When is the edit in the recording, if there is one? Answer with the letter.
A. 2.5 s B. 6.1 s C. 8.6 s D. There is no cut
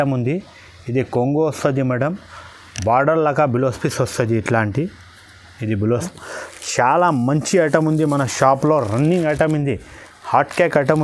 B